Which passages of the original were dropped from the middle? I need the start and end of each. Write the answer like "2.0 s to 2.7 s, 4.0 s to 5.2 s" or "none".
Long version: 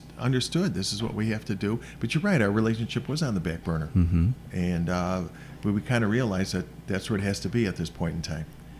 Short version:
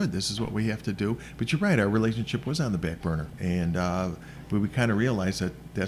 3.9 s to 4.4 s